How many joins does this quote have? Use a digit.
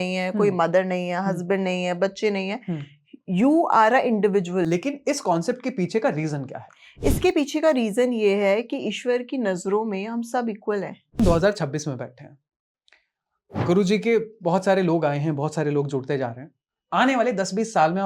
2